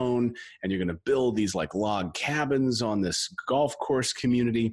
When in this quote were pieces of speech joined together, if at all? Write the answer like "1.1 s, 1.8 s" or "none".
none